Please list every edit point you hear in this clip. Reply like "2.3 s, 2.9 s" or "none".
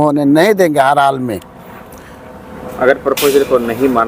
none